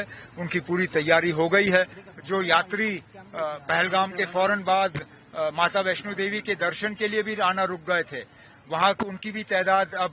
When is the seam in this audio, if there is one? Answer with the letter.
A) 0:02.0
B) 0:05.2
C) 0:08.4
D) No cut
A